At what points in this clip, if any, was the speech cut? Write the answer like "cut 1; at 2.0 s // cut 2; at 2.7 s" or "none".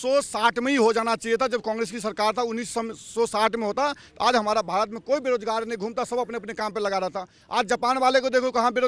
none

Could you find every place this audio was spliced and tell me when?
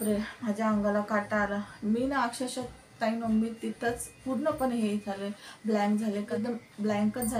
cut 1; at 6.3 s

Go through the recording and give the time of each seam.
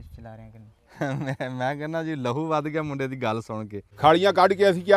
cut 1; at 3.8 s

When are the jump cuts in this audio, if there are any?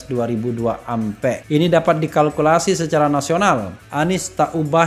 cut 1; at 1.4 s // cut 2; at 3.8 s

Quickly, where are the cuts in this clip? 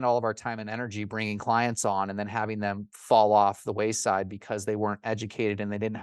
none

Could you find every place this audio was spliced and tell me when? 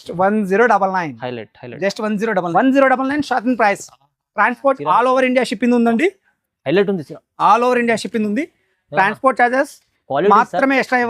cut 1; at 2.5 s

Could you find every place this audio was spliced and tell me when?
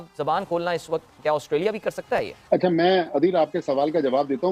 none

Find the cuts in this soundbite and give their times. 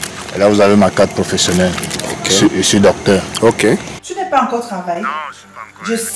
cut 1; at 4.0 s

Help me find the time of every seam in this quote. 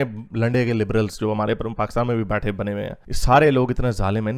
none

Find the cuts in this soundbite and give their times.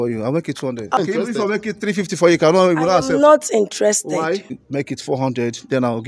cut 1; at 1.0 s // cut 2; at 4.6 s

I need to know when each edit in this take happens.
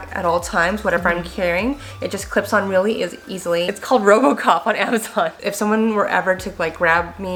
none

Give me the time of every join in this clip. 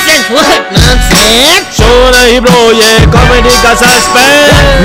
none

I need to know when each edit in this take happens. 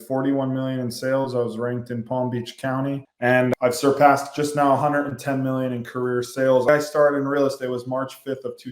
cut 1; at 3.4 s // cut 2; at 6.7 s

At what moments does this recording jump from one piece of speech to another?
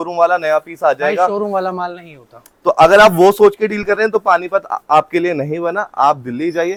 none

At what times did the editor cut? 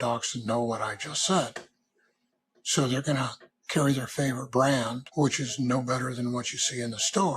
none

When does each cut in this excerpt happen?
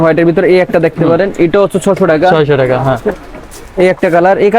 none

